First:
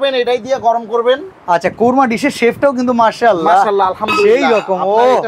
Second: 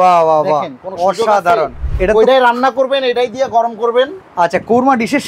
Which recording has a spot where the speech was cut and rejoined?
second; 1 cut; at 1.9 s

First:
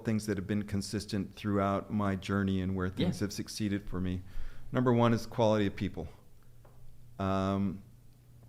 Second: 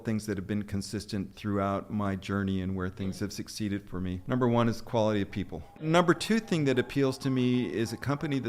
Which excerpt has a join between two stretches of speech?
second; 2 cuts; at 4.2 s, 5.8 s

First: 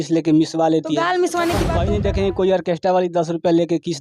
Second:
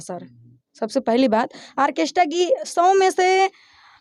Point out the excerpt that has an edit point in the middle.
first; 1 cut; at 1.7 s

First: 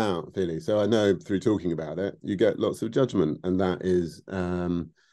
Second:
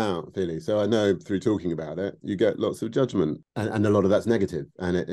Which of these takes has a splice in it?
second; 1 cut; at 3.4 s

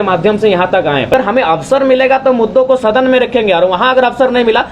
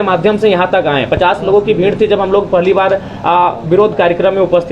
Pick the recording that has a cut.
first; 1 cut; at 1.1 s

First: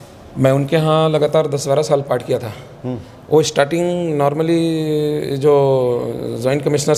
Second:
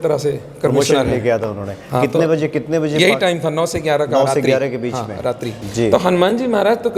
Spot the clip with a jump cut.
second; 1 cut; at 5.6 s

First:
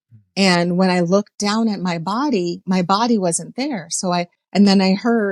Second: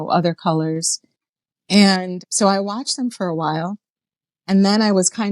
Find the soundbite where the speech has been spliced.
second; 1 cut; at 2.2 s

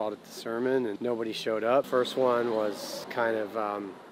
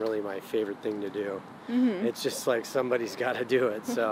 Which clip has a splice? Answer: first; 3 cuts; at 1.0 s, 1.9 s, 3.0 s

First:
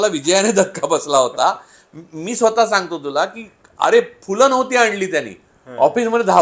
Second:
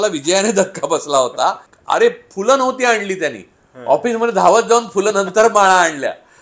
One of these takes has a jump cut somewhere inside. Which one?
second; 1 cut; at 1.7 s

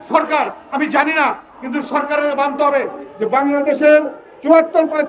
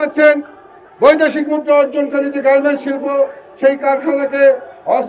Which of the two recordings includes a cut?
first; 1 cut; at 3.0 s

